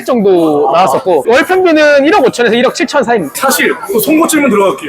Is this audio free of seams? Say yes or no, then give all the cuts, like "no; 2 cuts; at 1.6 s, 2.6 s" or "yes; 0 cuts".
yes; 0 cuts